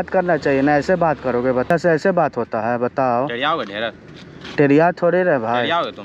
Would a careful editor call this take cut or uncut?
cut